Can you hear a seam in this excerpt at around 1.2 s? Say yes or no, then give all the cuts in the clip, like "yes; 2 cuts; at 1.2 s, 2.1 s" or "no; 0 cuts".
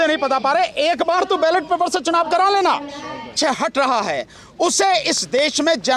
no; 1 cut; at 3.4 s